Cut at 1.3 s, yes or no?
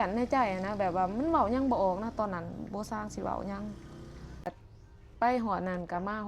no